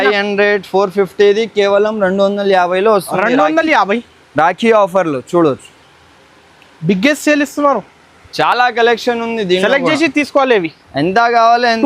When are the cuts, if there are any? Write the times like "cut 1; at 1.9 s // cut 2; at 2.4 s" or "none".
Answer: none